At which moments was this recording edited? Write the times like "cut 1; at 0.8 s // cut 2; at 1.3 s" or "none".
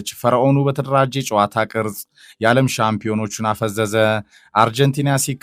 none